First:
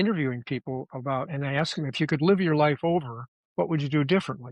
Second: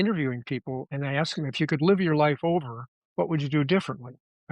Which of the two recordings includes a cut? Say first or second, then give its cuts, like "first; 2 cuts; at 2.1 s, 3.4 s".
second; 1 cut; at 0.9 s